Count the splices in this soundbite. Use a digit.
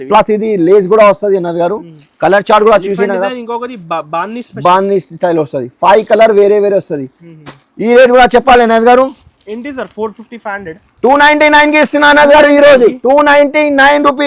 0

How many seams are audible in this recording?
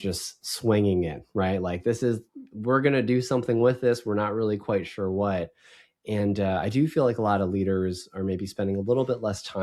0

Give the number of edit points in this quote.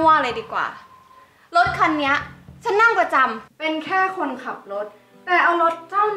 1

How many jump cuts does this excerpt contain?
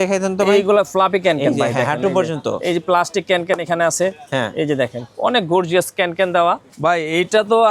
1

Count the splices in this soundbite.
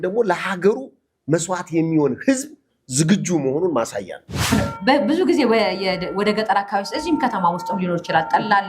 1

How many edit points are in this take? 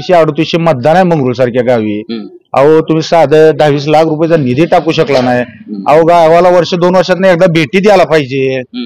0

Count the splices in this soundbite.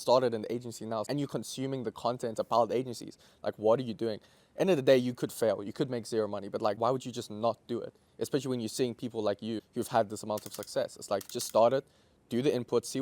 3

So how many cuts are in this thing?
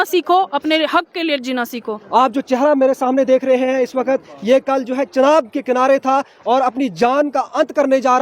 1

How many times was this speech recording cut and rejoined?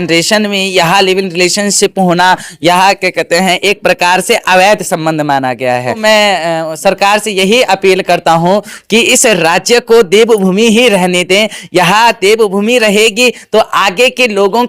1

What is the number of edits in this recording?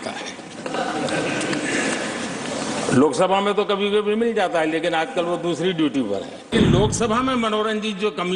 1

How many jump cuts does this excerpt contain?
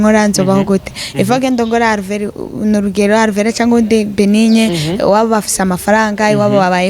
0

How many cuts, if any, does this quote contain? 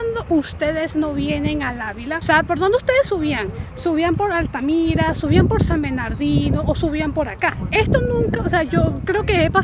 0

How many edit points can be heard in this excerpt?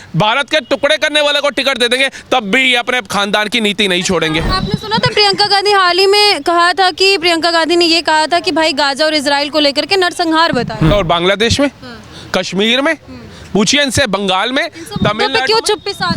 2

